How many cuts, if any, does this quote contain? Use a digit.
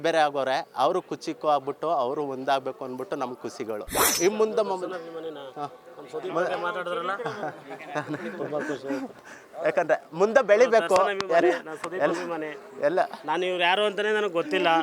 1